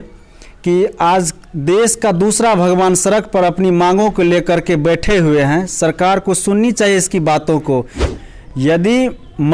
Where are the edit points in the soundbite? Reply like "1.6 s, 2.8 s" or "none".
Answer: 8.1 s